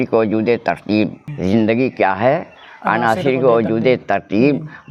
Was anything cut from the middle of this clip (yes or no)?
yes